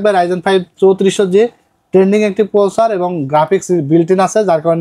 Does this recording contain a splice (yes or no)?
no